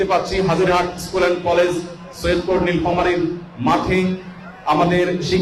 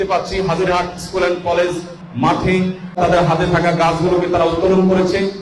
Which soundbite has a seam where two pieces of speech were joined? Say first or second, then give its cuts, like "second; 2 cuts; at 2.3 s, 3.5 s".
second; 2 cuts; at 2.0 s, 3.0 s